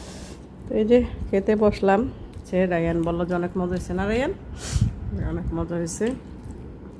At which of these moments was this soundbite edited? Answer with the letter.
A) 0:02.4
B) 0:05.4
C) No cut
A